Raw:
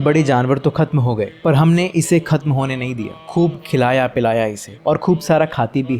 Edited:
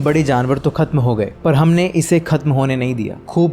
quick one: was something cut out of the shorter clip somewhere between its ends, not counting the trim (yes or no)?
no